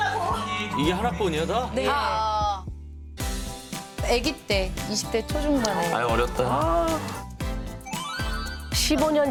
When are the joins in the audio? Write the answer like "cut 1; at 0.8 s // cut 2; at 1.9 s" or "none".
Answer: none

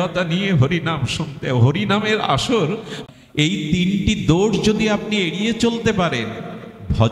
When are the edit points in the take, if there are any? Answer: cut 1; at 3.0 s

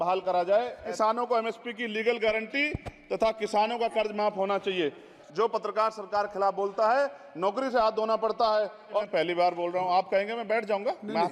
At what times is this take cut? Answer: cut 1; at 0.8 s // cut 2; at 5.2 s // cut 3; at 9.1 s

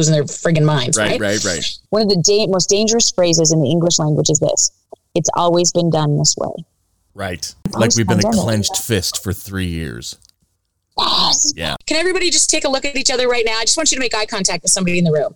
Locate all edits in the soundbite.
cut 1; at 1.7 s // cut 2; at 7.7 s // cut 3; at 11.7 s

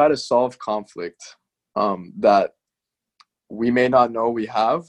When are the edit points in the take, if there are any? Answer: none

